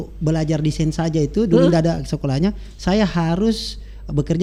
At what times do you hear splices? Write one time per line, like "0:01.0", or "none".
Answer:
none